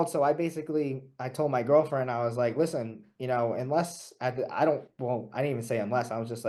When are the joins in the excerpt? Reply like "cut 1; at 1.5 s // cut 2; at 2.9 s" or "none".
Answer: none